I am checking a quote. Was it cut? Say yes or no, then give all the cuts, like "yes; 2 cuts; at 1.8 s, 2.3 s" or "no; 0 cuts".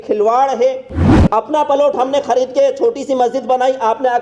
yes; 1 cut; at 1.0 s